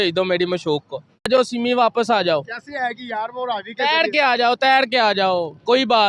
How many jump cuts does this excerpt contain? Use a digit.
1